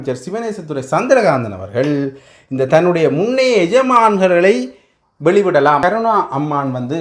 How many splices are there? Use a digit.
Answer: 1